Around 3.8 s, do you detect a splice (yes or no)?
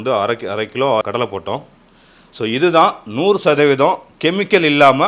no